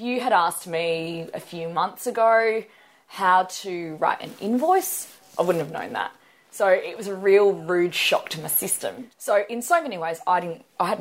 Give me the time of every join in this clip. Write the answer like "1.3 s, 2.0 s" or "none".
8.9 s